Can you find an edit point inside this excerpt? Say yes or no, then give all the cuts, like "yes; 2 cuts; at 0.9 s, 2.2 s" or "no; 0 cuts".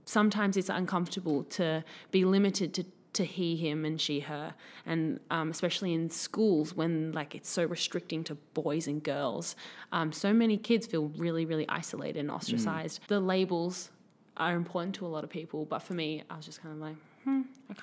yes; 1 cut; at 12.9 s